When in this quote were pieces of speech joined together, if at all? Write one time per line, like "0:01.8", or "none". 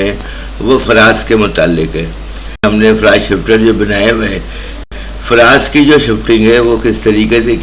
0:02.6
0:04.8